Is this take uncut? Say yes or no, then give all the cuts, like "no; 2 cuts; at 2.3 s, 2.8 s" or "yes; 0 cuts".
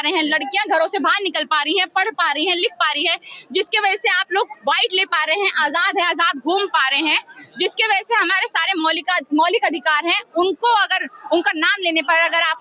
yes; 0 cuts